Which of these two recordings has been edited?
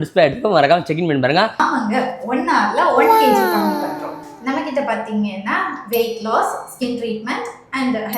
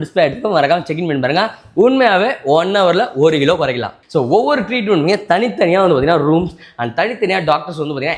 first; 1 cut; at 1.6 s

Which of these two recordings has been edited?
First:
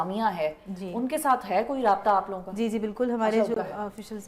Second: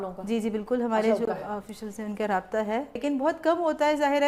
second; 1 cut; at 3.0 s

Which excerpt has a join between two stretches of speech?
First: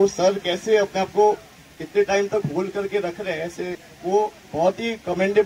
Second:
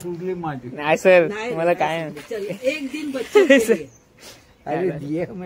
first; 1 cut; at 3.9 s

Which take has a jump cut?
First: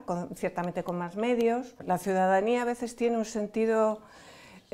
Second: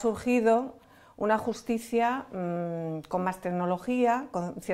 first; 1 cut; at 1.7 s

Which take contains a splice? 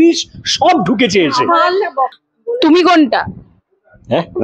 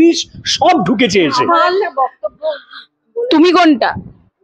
first; 1 cut; at 2.3 s

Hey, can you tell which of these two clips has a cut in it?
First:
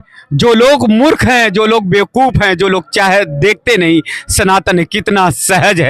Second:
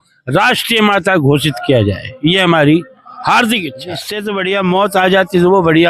second; 1 cut; at 4.1 s

